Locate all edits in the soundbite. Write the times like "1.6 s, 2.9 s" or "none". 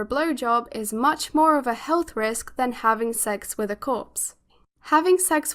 4.5 s